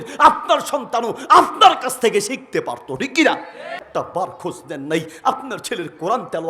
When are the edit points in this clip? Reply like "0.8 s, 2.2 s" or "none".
4.1 s